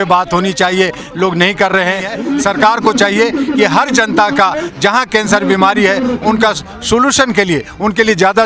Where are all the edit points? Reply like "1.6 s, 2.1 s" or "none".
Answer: 2.1 s

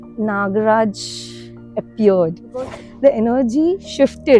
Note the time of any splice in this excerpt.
2.8 s

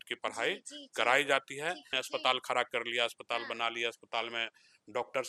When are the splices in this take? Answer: 2.0 s

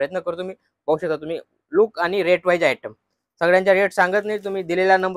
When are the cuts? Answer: none

